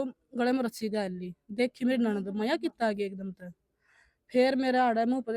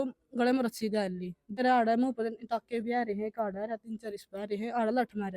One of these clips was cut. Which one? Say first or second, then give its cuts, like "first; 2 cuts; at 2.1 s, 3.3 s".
second; 1 cut; at 1.6 s